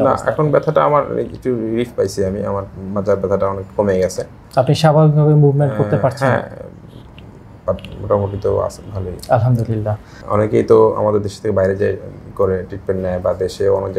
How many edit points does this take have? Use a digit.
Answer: 1